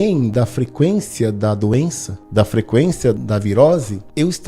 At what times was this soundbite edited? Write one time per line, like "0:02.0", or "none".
0:03.2